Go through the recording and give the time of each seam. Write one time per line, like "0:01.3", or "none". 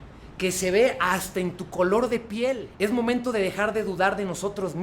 0:02.6